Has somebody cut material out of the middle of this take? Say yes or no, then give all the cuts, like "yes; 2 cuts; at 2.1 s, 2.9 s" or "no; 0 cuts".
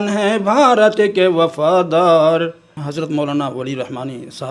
yes; 1 cut; at 2.8 s